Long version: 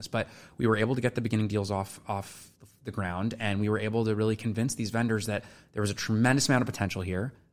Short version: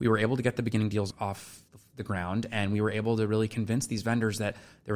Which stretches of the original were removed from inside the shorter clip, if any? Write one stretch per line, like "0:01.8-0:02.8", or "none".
0:01.7-0:02.0